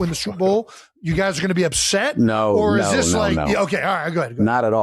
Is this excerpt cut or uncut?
uncut